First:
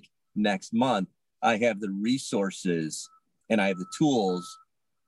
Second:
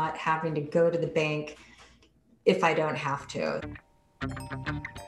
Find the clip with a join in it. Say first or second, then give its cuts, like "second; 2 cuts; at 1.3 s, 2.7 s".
second; 1 cut; at 3.7 s